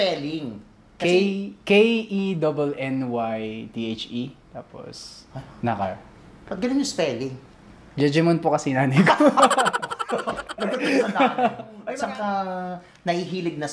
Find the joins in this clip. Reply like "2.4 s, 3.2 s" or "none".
11.8 s